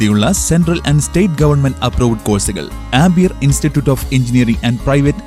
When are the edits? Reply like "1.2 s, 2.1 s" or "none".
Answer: none